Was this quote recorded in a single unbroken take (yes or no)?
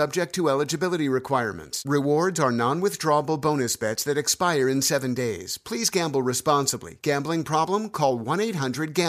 yes